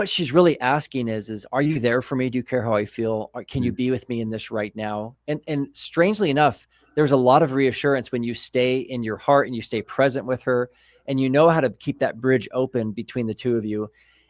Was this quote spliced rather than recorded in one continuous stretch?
no; 0 cuts

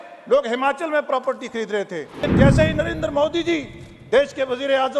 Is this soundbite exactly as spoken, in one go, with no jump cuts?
no; 1 cut; at 2.2 s

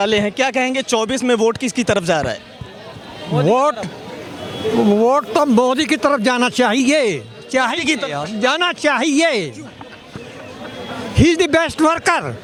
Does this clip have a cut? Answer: no; 0 cuts

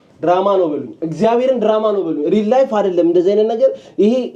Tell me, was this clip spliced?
no; 0 cuts

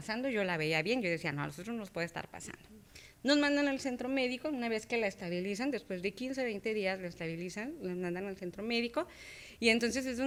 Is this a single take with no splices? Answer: yes; 0 cuts

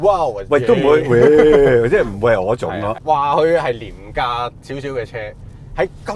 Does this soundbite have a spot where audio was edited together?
yes; 1 cut; at 3.0 s

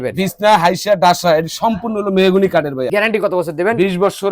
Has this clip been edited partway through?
yes; 1 cut; at 2.9 s

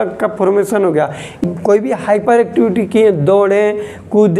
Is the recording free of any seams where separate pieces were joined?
no; 1 cut; at 1.4 s

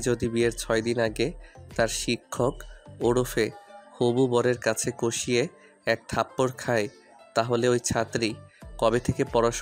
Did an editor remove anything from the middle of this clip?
no; 0 cuts

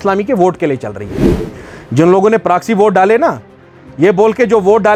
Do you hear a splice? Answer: no; 0 cuts

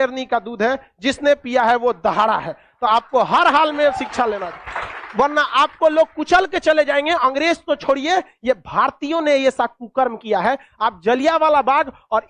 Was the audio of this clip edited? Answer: no; 0 cuts

